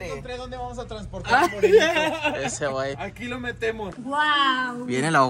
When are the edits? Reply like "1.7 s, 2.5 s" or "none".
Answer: 3.9 s